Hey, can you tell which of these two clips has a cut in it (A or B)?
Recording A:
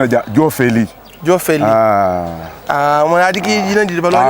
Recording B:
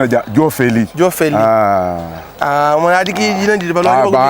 B